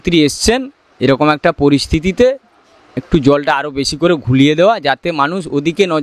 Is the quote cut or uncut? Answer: uncut